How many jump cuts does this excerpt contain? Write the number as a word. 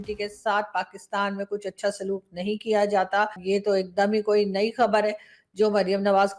one